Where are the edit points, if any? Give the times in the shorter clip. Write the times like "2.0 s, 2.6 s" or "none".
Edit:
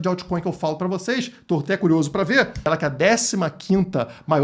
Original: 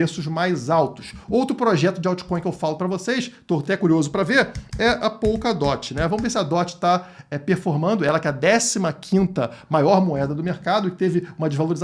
2.7 s